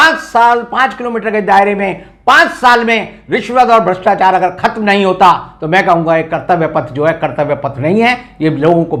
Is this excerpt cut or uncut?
uncut